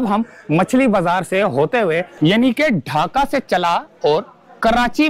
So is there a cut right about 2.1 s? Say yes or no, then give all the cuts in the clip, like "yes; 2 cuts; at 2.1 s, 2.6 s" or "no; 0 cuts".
yes; 1 cut; at 2.1 s